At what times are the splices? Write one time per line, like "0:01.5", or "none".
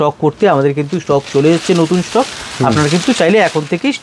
none